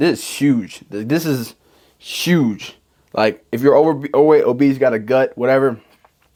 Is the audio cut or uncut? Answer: uncut